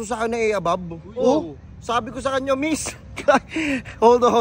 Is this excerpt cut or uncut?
uncut